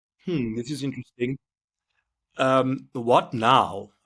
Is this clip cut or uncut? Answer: uncut